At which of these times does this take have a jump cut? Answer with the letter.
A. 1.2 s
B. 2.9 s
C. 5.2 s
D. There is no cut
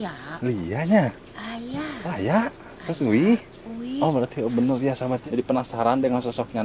C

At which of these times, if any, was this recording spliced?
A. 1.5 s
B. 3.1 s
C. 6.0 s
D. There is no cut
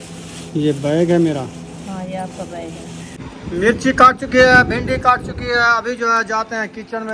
B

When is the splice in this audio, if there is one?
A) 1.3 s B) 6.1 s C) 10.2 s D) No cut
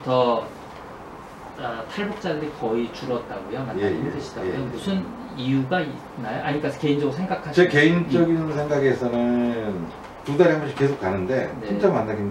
C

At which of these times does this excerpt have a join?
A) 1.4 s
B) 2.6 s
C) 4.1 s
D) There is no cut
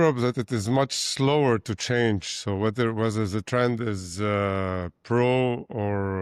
D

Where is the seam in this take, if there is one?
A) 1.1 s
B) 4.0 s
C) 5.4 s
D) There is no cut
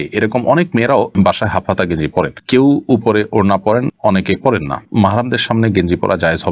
D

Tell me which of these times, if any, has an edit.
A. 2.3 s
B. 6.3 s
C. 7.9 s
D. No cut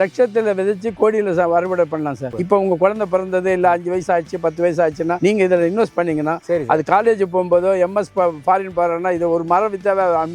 A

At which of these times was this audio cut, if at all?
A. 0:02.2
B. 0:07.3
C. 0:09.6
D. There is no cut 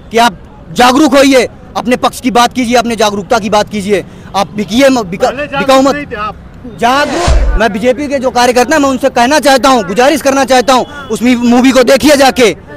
B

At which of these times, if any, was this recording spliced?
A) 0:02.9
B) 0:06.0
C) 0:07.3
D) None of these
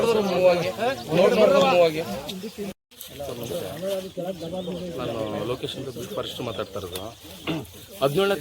A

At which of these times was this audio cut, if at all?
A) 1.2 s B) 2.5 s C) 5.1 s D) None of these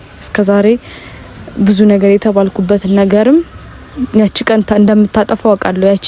D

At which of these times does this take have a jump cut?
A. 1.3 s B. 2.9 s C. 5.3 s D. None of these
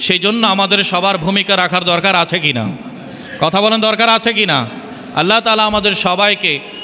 D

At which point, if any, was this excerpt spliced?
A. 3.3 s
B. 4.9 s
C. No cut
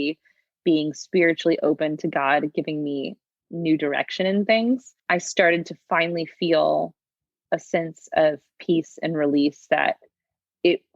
B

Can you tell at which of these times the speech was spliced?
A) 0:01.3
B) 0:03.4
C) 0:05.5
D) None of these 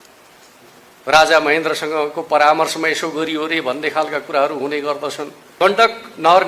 C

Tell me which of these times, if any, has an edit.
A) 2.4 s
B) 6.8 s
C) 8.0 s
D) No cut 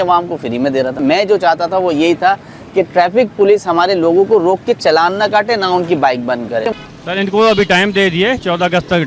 B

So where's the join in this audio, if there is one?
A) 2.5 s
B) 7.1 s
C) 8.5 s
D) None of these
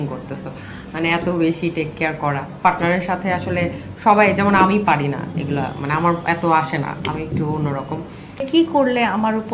C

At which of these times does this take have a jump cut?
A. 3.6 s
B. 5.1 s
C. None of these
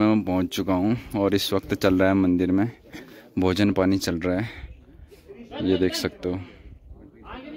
C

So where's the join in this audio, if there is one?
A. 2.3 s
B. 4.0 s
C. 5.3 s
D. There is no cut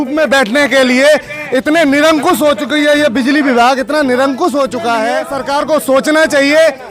C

